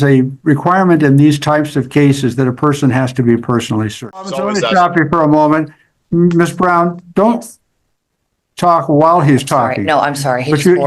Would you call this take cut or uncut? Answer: cut